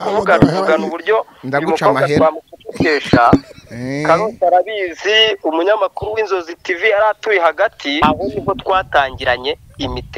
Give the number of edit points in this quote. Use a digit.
1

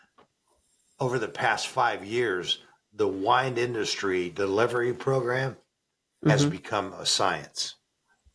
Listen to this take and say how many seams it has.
0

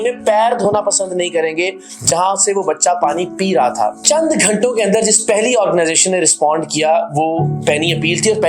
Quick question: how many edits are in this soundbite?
1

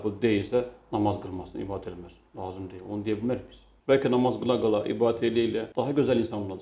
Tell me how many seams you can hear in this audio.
1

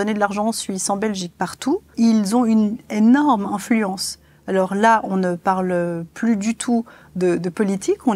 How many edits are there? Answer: 1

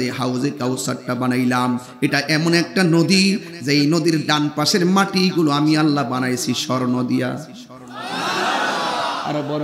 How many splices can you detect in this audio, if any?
0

